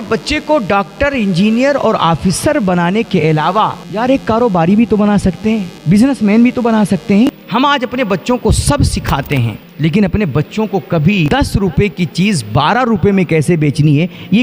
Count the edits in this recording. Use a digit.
5